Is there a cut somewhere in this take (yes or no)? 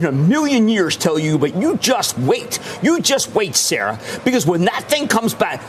no